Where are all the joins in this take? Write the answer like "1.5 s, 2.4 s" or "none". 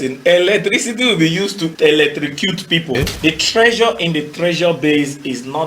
1.7 s, 3.0 s